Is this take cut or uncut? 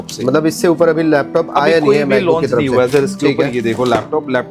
uncut